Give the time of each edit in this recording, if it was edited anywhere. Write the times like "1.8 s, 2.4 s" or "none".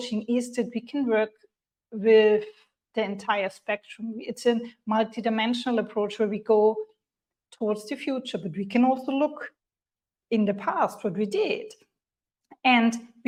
none